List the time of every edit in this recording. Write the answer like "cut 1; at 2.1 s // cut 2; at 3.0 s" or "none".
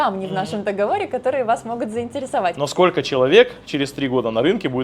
cut 1; at 2.6 s